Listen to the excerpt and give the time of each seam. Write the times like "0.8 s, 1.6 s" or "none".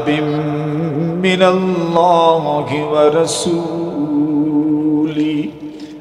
none